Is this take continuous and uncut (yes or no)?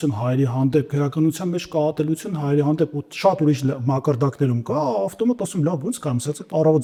yes